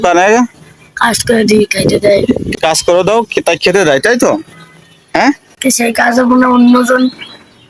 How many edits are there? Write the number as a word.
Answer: two